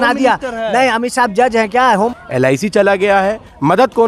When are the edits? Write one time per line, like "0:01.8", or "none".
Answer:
0:02.1